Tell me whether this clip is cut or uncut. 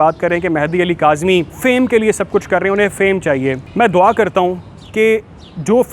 cut